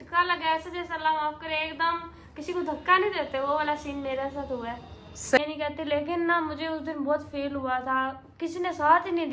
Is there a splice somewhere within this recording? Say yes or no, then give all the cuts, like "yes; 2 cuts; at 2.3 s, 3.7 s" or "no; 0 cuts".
yes; 1 cut; at 5.4 s